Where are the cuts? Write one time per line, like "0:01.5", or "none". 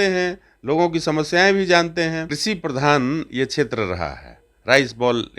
0:02.3